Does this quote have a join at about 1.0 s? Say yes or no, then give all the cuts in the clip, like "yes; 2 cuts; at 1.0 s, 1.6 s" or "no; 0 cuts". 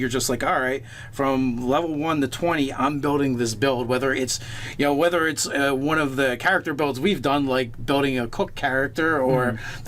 yes; 1 cut; at 1.0 s